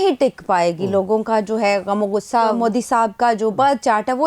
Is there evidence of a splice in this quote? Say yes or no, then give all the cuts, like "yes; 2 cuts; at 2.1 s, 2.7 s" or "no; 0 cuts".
yes; 1 cut; at 2.6 s